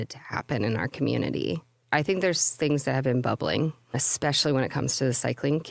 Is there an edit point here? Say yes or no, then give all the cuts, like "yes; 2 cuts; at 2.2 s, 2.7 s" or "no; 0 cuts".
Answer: no; 0 cuts